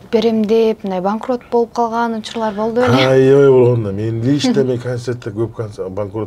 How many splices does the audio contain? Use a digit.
0